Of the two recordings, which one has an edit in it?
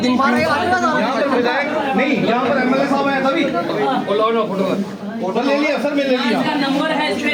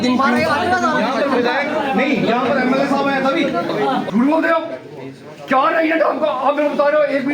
second; 1 cut; at 4.0 s

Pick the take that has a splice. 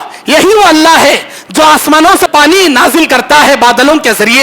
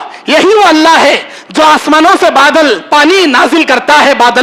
first; 1 cut; at 2.3 s

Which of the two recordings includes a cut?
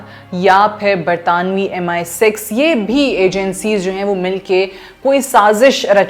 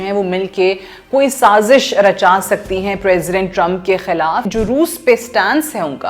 second; 1 cut; at 4.5 s

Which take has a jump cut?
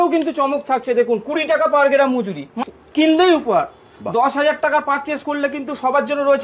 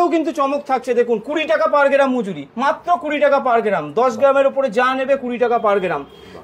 first; 1 cut; at 2.4 s

